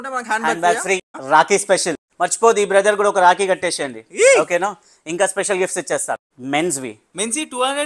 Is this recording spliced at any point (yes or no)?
yes